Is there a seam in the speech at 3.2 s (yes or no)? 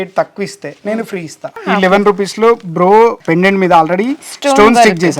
yes